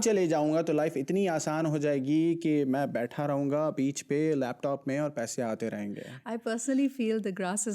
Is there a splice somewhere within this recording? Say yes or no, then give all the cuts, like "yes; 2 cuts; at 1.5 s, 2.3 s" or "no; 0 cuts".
no; 0 cuts